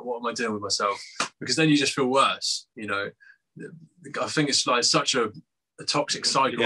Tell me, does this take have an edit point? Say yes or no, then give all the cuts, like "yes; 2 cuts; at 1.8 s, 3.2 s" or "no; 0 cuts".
no; 0 cuts